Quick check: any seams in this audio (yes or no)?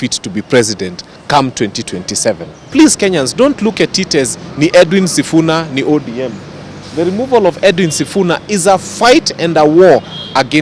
yes